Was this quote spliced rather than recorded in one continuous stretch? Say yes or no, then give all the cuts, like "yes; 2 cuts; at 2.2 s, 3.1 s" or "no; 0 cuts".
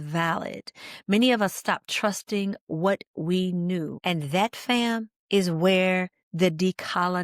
yes; 3 cuts; at 3.9 s, 5.1 s, 6.2 s